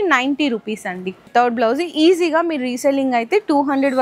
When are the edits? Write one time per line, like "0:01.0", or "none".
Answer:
0:01.2

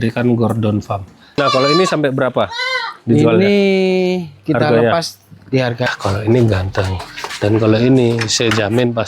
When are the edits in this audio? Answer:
0:01.4
0:05.9

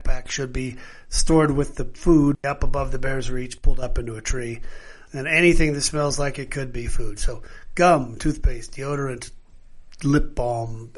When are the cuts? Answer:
0:02.4
0:05.0

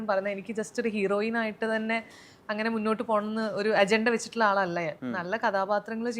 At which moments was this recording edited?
0:05.0

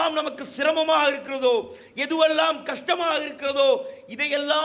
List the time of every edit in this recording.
none

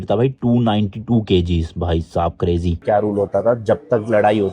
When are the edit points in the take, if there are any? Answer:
0:02.8

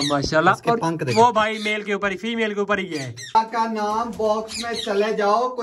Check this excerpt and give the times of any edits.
0:03.2

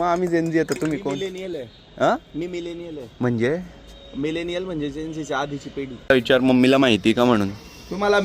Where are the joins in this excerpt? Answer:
0:06.0

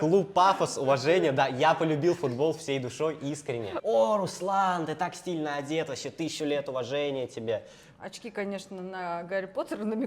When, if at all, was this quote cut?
0:03.8
0:07.8

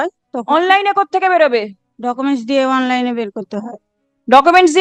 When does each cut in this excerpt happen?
0:01.8

